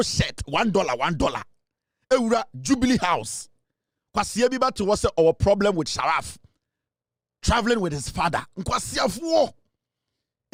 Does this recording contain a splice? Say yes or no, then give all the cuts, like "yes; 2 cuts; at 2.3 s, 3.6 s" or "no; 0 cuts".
no; 0 cuts